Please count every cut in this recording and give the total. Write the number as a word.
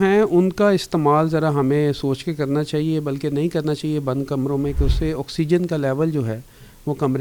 zero